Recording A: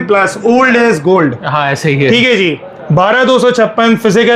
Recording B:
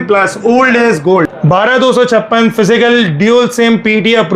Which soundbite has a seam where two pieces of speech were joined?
B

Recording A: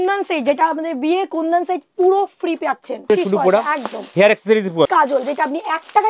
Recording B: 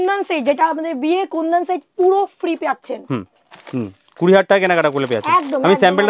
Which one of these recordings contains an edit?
A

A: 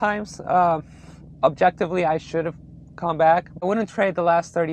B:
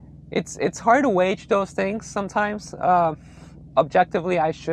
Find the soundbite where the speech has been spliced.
A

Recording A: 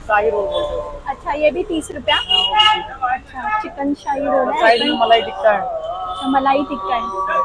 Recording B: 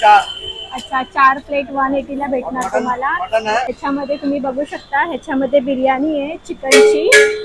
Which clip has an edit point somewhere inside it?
B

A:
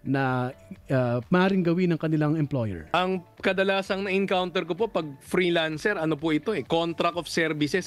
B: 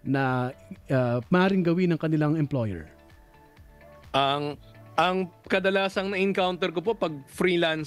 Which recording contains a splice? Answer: A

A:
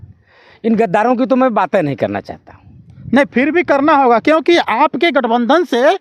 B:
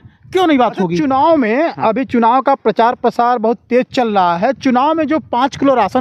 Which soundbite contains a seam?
B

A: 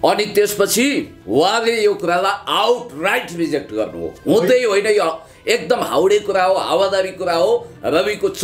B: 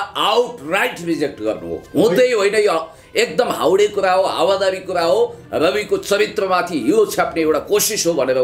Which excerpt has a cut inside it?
A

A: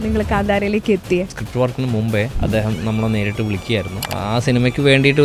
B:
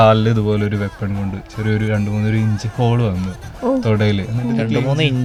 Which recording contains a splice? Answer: A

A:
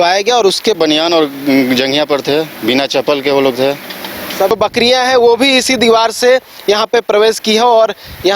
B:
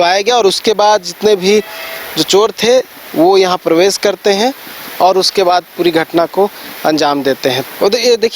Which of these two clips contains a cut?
A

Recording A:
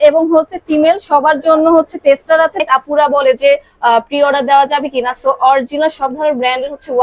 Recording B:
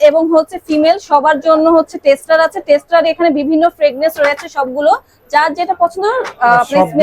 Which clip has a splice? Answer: A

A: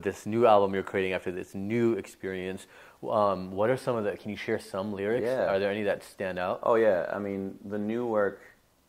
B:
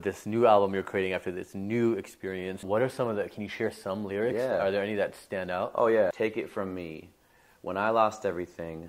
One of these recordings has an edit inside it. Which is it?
B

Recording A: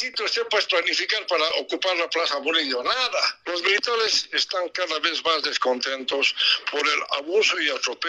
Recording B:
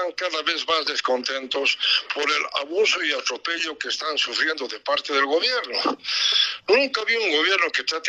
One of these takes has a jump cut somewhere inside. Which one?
A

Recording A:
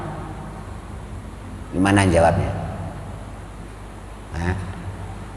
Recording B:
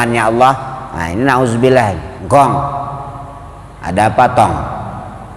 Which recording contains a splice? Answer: B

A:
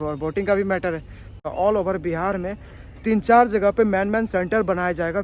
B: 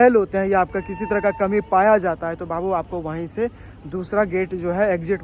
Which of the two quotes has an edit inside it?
A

